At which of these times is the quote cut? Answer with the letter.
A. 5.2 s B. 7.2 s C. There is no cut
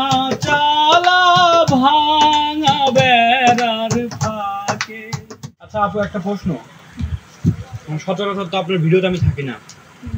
A